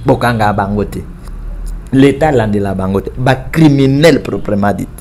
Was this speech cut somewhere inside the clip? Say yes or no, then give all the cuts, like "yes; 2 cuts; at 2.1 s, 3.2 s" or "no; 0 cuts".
no; 0 cuts